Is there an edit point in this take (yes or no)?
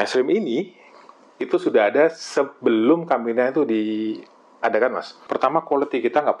yes